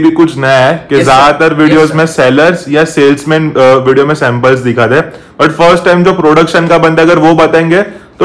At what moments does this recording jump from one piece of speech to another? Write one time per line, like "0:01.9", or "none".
none